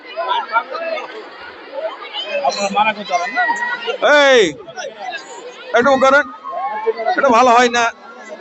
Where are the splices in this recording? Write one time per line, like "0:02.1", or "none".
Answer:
none